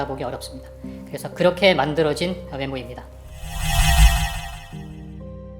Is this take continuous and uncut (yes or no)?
no